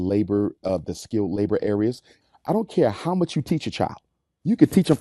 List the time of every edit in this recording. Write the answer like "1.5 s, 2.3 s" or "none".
2.2 s

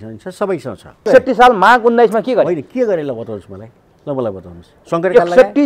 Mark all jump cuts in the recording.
1.1 s

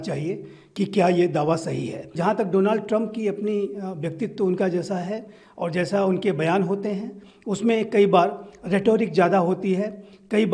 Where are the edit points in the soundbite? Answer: 2.1 s

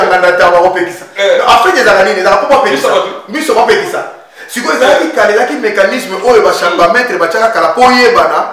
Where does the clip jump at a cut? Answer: none

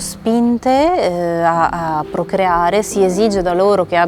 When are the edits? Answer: none

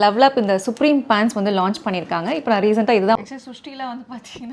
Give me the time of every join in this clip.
3.2 s

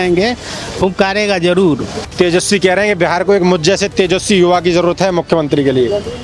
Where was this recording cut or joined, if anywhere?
2.0 s

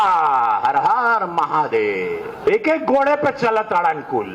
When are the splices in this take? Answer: 2.4 s

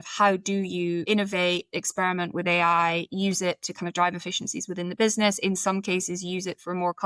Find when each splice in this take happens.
1.0 s

